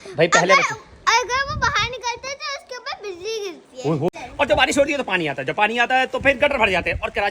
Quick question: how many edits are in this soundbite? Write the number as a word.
one